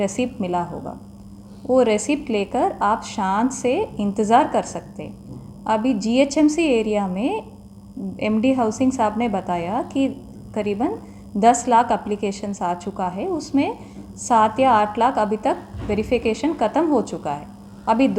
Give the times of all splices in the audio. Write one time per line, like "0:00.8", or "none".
none